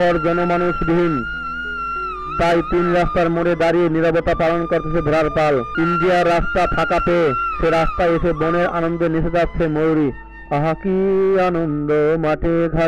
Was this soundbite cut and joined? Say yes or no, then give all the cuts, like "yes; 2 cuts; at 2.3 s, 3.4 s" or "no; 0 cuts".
yes; 1 cut; at 5.7 s